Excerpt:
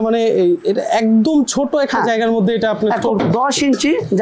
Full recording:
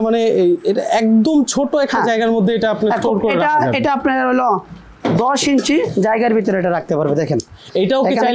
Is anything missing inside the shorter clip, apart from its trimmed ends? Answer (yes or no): yes